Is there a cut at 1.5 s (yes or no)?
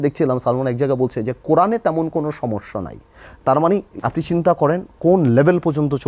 no